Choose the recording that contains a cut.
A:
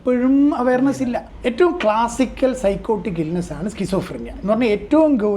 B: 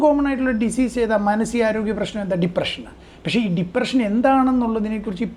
A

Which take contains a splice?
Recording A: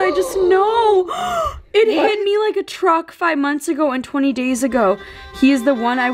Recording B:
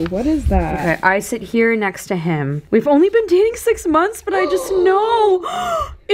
B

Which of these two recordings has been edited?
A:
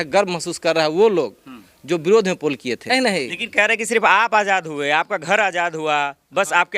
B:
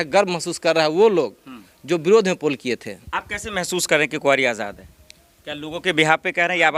A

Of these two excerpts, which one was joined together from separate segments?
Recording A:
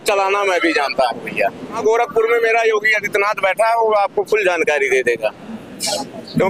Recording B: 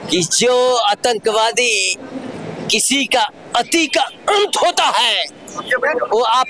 A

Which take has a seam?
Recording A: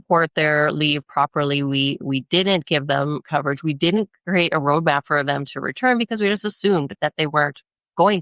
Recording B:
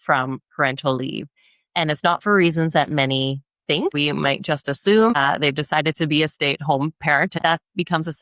B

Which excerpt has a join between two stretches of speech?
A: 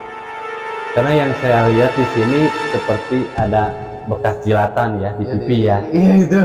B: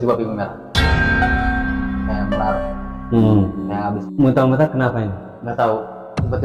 B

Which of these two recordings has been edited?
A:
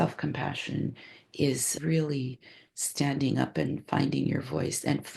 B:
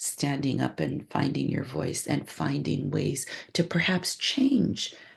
A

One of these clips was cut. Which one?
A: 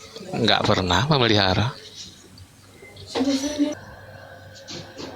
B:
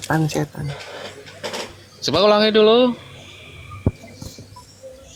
A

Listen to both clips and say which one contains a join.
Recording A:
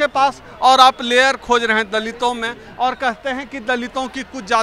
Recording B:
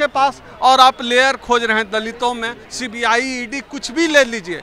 B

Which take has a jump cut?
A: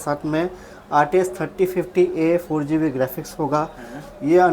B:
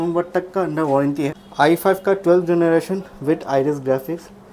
B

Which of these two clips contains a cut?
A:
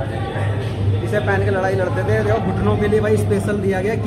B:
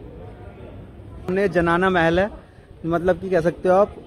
B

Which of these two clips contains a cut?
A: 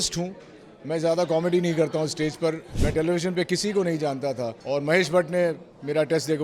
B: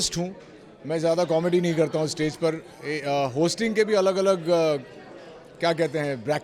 A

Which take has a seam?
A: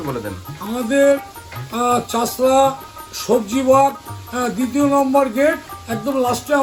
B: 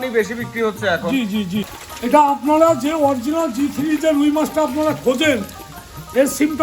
B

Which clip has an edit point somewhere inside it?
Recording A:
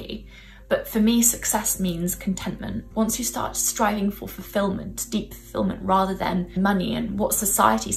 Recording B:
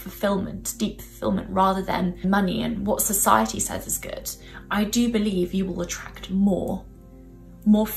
A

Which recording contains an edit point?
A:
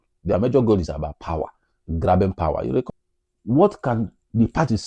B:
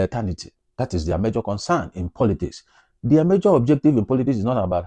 A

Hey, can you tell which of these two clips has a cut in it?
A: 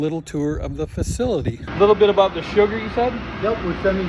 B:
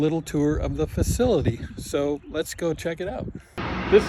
A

